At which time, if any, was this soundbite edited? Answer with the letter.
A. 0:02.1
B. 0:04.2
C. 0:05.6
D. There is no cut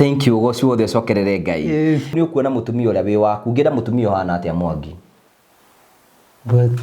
A